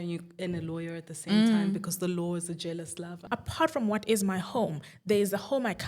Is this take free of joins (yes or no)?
no